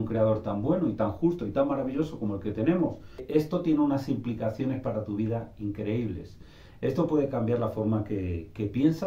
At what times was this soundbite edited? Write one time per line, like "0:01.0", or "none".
0:03.2